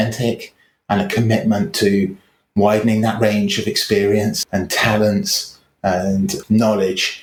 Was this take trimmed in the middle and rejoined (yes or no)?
no